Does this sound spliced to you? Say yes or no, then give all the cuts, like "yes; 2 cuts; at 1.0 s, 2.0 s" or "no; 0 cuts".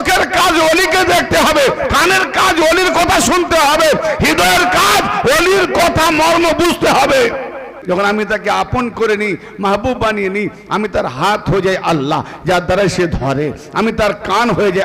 yes; 1 cut; at 7.8 s